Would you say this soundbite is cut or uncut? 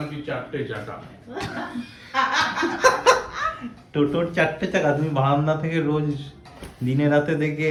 uncut